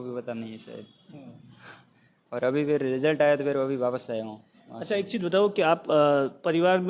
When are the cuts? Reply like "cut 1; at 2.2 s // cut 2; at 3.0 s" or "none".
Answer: none